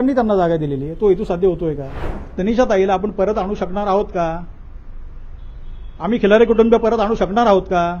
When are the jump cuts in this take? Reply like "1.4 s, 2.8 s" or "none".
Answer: 2.2 s